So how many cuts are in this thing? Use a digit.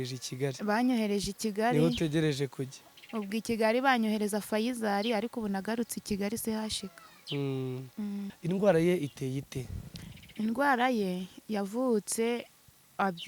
1